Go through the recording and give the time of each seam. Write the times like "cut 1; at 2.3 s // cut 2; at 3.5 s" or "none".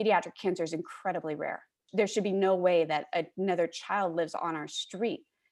cut 1; at 1.7 s